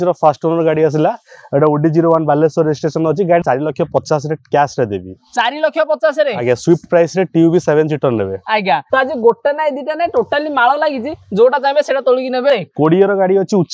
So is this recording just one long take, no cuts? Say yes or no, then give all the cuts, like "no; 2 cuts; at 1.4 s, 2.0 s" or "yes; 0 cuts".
no; 3 cuts; at 3.4 s, 8.8 s, 12.5 s